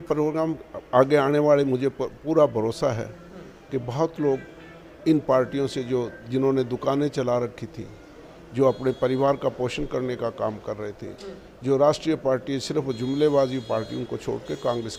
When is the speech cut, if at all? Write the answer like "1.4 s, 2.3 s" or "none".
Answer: none